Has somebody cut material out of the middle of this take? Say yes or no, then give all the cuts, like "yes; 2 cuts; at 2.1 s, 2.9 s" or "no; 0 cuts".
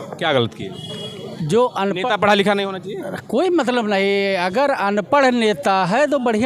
no; 0 cuts